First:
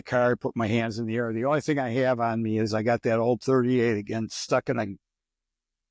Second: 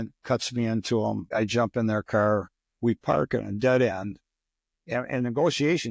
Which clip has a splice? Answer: second; 2 cuts; at 1.3 s, 2.5 s

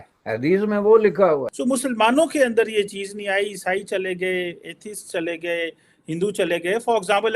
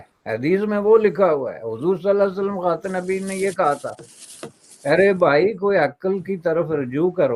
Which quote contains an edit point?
first; 1 cut; at 1.5 s

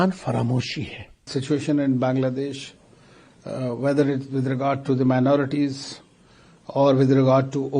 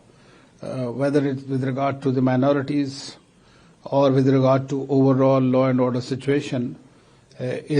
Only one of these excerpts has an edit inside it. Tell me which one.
first; 1 cut; at 1.3 s

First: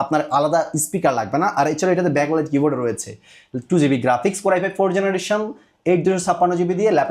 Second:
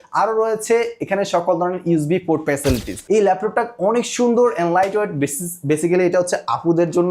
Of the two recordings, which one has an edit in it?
second; 1 cut; at 2.9 s

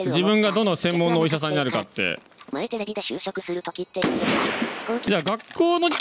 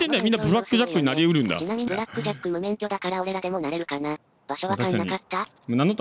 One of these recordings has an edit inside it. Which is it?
first; 2 cuts; at 2.3 s, 5.1 s

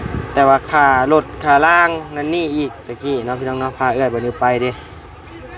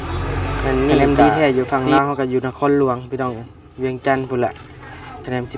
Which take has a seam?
second; 1 cut; at 1.0 s

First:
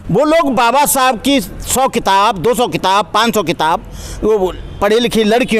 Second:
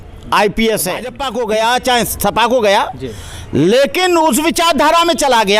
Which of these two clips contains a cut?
second; 1 cut; at 1.2 s

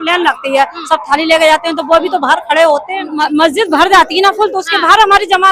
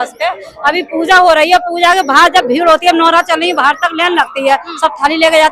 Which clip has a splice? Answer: first; 1 cut; at 3.1 s

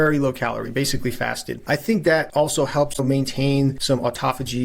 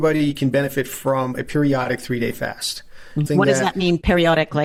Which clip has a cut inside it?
first; 3 cuts; at 1.6 s, 2.3 s, 3.8 s

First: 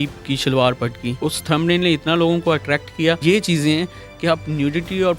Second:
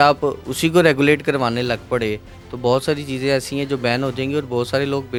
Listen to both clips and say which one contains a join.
first; 2 cuts; at 1.1 s, 3.2 s

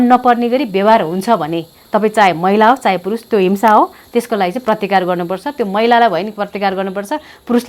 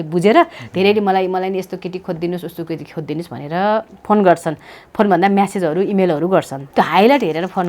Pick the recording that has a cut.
second; 1 cut; at 6.6 s

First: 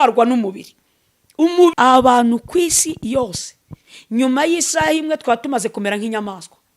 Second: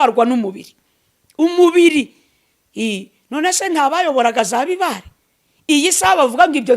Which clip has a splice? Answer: first; 1 cut; at 1.7 s

